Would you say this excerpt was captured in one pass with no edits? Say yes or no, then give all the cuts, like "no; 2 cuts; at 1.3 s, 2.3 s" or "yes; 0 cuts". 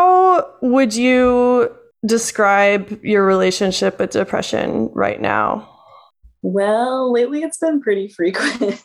no; 1 cut; at 1.9 s